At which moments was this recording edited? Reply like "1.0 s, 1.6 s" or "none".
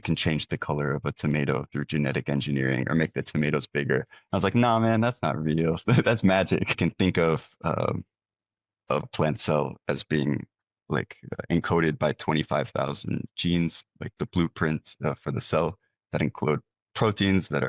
6.8 s, 9.1 s

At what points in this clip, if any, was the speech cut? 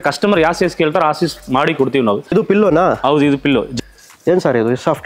2.3 s, 3.7 s

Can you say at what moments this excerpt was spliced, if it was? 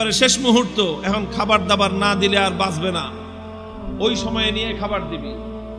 none

